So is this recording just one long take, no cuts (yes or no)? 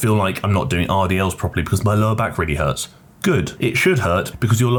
yes